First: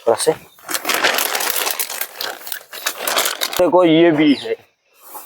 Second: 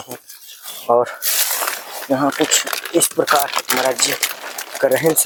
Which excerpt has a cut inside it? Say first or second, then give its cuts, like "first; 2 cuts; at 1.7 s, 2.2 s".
first; 1 cut; at 3.4 s